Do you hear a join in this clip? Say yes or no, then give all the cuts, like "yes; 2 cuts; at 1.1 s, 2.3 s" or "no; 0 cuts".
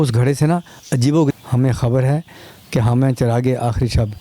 yes; 1 cut; at 1.3 s